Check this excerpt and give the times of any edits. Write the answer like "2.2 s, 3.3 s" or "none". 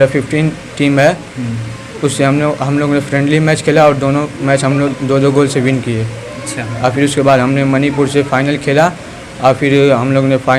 none